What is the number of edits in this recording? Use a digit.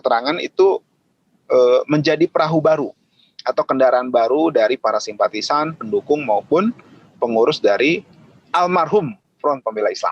0